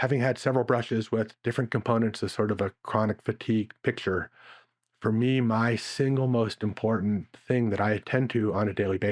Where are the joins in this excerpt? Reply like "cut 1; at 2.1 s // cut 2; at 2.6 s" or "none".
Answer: none